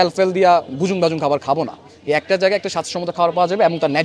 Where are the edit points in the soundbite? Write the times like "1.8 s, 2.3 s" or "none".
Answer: none